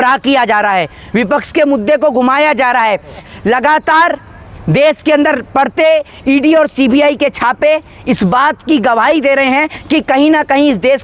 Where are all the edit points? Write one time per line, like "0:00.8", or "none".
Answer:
0:03.3